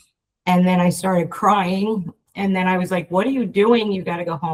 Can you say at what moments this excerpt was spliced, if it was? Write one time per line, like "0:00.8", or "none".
none